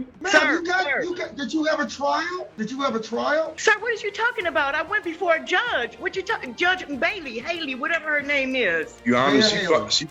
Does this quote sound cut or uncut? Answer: uncut